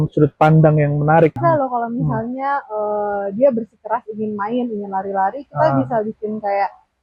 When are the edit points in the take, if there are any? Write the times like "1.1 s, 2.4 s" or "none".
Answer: 1.4 s